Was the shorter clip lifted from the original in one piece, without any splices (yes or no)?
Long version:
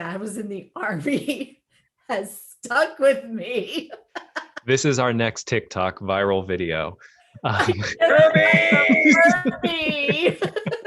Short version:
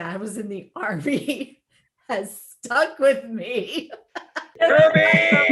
no